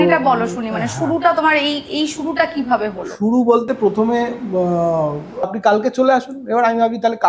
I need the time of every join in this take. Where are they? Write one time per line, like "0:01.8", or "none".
0:05.5